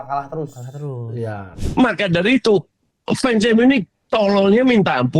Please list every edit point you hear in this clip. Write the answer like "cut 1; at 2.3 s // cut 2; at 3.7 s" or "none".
cut 1; at 1.6 s